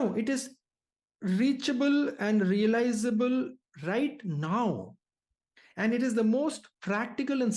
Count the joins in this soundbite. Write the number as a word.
zero